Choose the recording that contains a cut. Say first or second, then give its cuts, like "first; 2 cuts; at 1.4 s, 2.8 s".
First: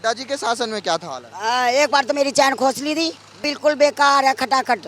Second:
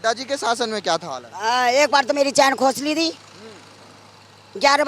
first; 1 cut; at 3.5 s